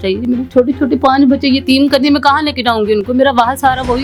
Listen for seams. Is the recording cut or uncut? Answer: uncut